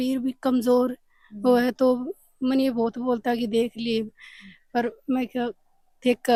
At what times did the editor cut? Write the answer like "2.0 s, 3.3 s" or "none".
none